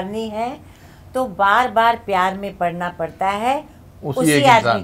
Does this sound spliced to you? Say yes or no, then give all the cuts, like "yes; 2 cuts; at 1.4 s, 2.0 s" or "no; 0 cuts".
no; 0 cuts